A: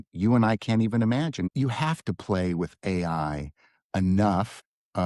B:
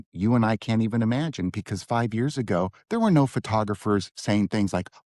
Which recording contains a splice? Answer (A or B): A